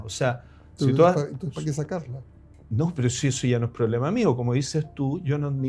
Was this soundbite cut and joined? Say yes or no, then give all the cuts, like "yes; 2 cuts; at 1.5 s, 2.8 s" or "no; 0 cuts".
no; 0 cuts